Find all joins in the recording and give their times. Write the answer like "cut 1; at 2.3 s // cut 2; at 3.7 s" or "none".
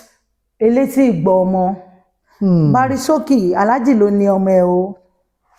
none